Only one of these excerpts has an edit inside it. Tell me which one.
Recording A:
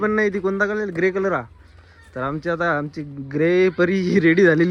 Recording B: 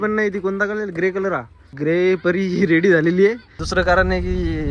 B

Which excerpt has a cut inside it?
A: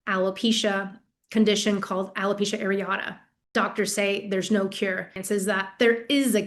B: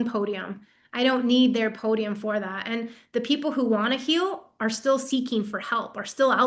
A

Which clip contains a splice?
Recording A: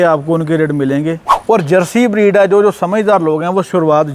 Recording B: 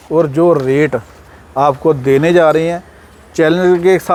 A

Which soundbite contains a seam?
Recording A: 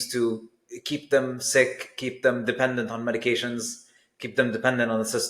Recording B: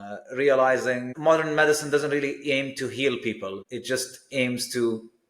B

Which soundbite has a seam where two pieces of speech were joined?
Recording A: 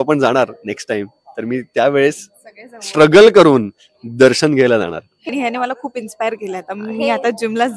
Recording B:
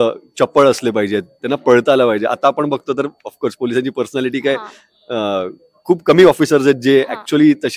A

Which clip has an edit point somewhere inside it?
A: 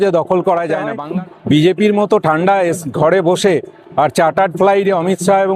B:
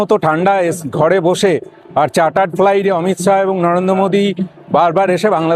A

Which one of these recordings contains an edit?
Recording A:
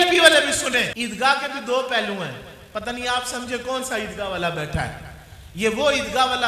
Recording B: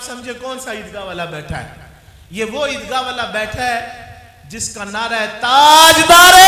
A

